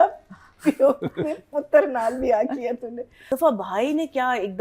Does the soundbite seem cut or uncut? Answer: cut